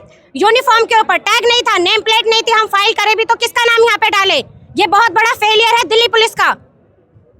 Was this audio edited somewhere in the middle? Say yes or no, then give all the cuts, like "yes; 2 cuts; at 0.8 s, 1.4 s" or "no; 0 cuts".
no; 0 cuts